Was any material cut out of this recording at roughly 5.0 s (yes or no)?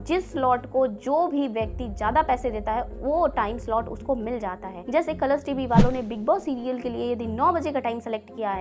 no